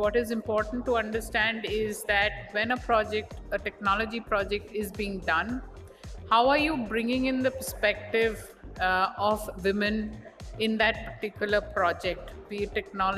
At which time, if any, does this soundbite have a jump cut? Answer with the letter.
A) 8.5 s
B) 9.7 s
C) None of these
C